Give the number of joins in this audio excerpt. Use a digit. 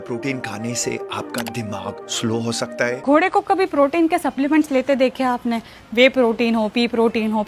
1